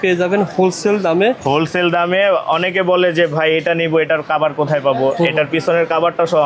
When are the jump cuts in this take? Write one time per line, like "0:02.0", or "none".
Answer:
none